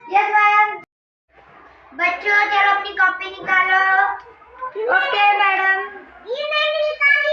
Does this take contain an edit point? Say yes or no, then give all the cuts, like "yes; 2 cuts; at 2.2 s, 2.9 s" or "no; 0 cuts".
yes; 1 cut; at 1.0 s